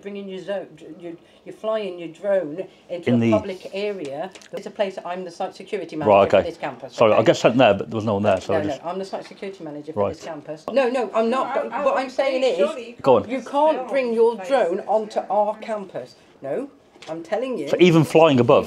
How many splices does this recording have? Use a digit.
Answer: 3